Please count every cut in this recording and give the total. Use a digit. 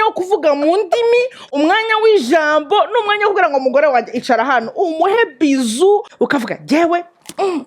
1